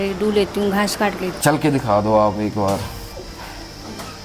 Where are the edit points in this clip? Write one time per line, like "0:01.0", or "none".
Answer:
0:01.3
0:03.1